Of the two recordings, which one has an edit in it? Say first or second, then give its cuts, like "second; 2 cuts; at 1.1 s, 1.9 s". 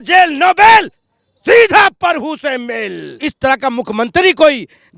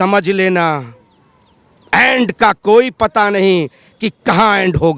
first; 1 cut; at 3.3 s